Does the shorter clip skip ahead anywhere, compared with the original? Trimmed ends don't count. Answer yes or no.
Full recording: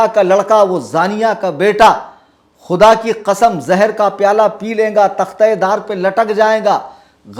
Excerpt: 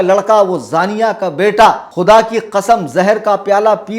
yes